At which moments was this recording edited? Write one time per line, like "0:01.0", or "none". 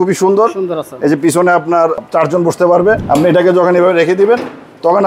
0:02.0
0:03.0